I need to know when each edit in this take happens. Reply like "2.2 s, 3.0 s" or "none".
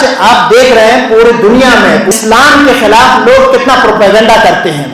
2.1 s